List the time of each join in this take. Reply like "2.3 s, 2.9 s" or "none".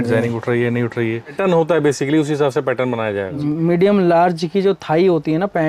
1.4 s, 3.4 s